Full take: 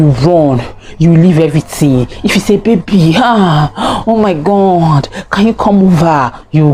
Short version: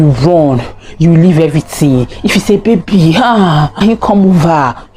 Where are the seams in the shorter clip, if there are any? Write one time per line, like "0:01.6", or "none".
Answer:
0:03.7